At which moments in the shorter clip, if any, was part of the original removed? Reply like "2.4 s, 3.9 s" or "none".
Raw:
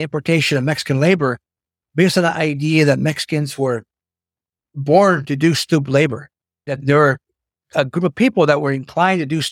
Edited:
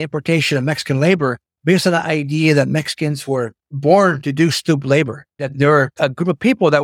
1.5 s, 3.6 s, 5.5 s